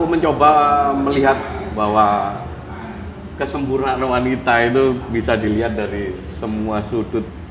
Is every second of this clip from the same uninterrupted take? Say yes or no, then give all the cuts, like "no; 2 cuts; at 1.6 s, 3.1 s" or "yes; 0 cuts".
yes; 0 cuts